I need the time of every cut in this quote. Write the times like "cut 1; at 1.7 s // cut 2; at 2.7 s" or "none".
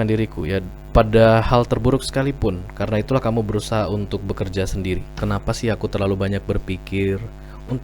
cut 1; at 5.2 s